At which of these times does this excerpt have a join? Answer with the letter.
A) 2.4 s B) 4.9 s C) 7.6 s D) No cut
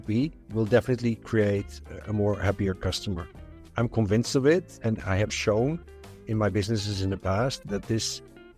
C